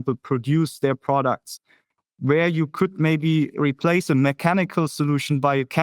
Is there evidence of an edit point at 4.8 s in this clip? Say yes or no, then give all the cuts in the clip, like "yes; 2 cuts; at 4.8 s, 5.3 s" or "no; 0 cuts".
no; 1 cut; at 3.5 s